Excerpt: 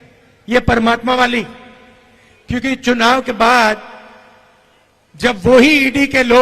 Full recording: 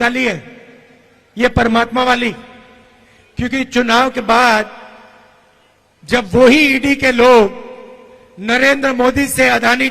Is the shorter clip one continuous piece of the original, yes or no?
yes